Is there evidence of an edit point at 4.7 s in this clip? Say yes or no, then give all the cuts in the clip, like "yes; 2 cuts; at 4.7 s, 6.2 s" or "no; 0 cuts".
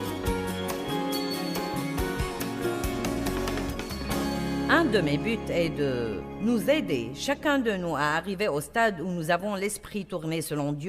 yes; 1 cut; at 4.7 s